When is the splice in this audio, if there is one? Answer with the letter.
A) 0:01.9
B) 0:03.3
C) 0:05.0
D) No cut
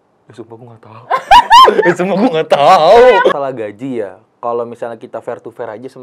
B